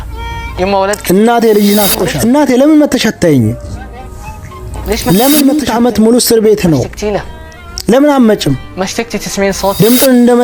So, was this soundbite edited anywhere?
yes; 2 cuts; at 2.1 s, 5.6 s

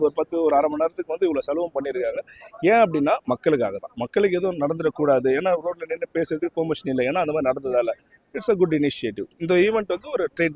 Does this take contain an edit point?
no; 0 cuts

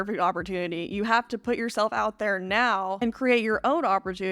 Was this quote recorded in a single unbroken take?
no; 1 cut; at 3.0 s

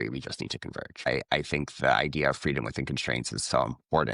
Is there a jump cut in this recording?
yes; 1 cut; at 1.1 s

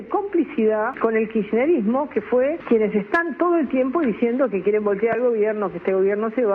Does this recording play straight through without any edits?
no; 2 cuts; at 0.9 s, 2.6 s

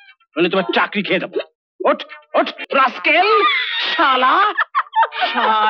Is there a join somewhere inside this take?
yes; 1 cut; at 2.6 s

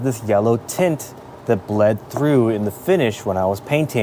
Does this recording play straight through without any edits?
yes; 0 cuts

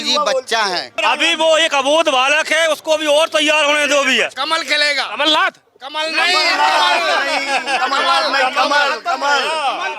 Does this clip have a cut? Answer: yes; 2 cuts; at 0.9 s, 4.3 s

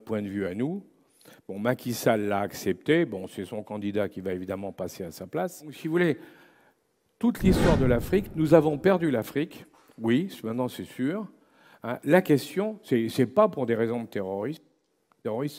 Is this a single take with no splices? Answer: no; 1 cut; at 5.7 s

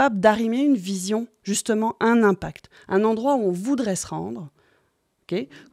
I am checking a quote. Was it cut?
no; 0 cuts

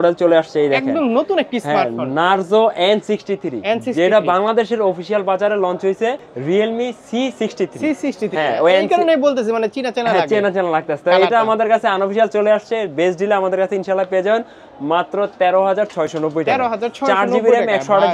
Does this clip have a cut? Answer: no; 0 cuts

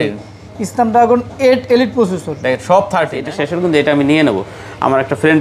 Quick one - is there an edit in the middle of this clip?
yes; 1 cut; at 3.3 s

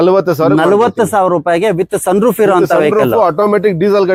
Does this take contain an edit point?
no; 0 cuts

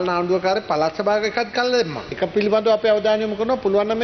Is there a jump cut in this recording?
yes; 1 cut; at 2.1 s

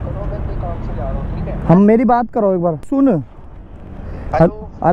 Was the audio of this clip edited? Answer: yes; 1 cut; at 2.9 s

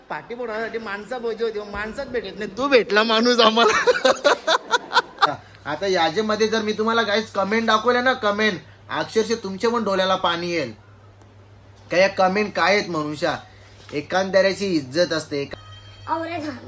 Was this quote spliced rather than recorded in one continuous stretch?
yes; 2 cuts; at 5.4 s, 15.5 s

